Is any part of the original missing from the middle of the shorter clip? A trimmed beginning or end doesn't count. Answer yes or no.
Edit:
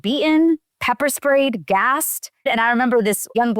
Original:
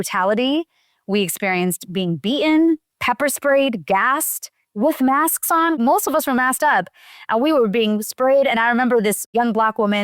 yes